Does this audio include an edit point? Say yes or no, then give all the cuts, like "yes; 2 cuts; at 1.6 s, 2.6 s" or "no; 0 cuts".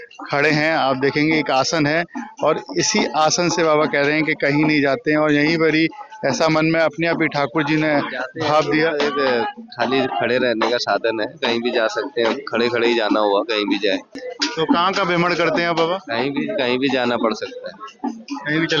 no; 0 cuts